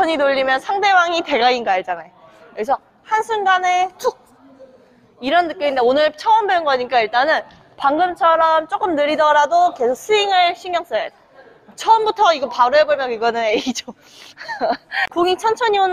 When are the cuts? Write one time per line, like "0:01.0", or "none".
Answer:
0:14.9